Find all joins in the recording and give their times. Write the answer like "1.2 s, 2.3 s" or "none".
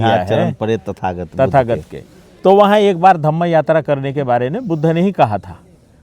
none

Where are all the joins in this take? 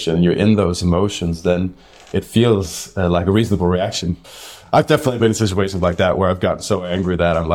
none

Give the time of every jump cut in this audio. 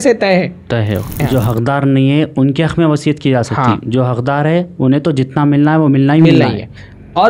1.2 s

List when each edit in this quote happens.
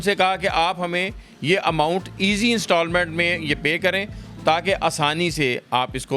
none

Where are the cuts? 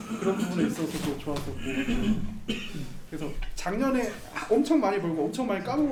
none

